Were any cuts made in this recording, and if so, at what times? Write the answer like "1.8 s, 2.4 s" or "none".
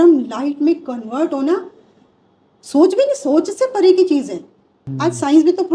4.8 s